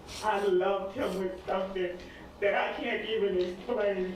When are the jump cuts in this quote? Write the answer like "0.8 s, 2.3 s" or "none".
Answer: none

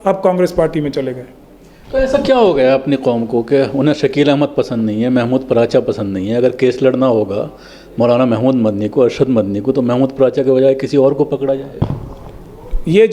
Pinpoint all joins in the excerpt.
none

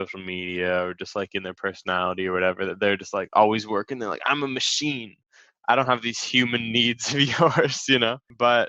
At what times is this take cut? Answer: none

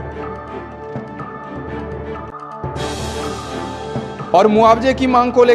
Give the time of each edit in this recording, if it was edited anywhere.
none

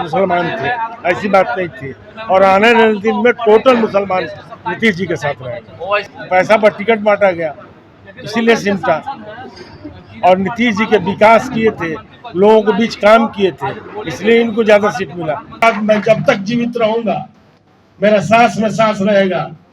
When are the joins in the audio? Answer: 6.1 s, 15.6 s

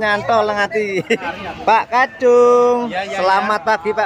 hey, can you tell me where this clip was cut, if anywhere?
1.3 s

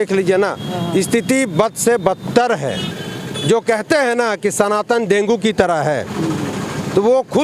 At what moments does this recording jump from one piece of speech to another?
2.9 s

